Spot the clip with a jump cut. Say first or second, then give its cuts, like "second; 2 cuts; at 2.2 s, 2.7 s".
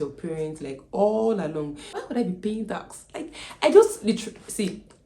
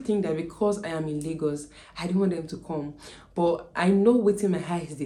first; 1 cut; at 2.0 s